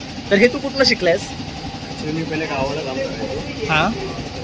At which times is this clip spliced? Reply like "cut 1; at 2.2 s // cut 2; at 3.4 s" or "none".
none

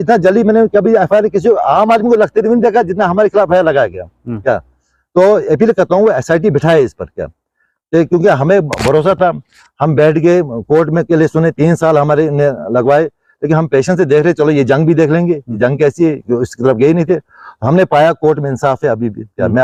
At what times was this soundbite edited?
none

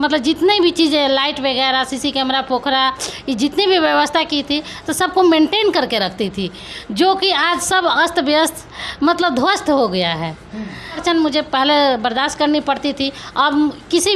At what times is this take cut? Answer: cut 1; at 11.0 s

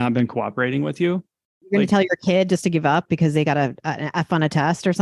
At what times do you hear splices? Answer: cut 1; at 1.4 s

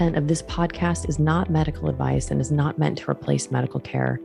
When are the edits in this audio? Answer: none

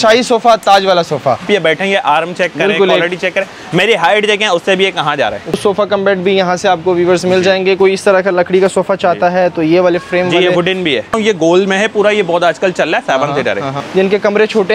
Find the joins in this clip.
cut 1; at 1.5 s // cut 2; at 5.6 s // cut 3; at 11.1 s // cut 4; at 13.7 s

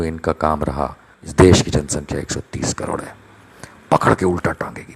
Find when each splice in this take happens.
cut 1; at 1.3 s

